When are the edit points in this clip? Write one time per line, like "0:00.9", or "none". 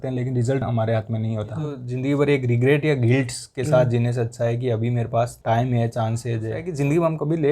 0:01.9
0:06.7

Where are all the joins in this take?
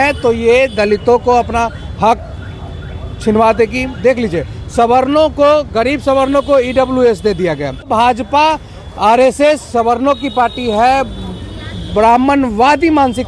0:07.9

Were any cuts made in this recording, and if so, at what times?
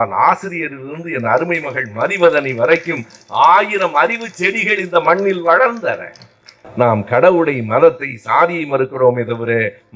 0:06.6

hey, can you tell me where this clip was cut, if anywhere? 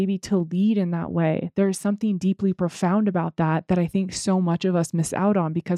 none

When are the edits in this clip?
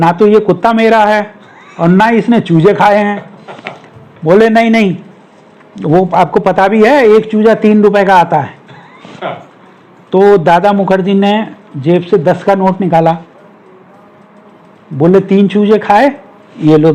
none

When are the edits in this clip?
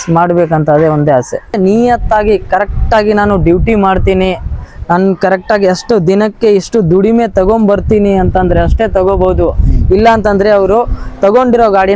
0:01.6

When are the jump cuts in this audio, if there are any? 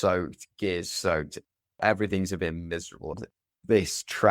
0:03.2

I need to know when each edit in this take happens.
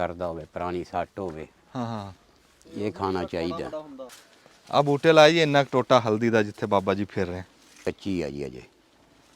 0:04.0
0:07.8

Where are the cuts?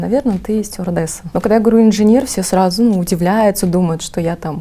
0:01.2

